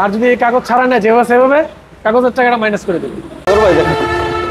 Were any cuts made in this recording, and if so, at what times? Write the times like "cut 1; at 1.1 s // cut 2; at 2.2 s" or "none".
cut 1; at 3.5 s